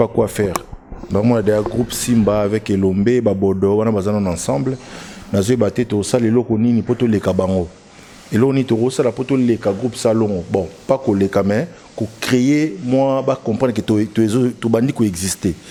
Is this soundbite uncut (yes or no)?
yes